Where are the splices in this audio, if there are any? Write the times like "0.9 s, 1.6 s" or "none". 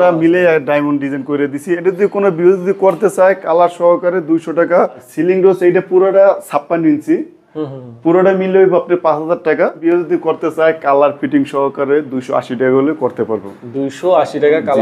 5.0 s, 9.8 s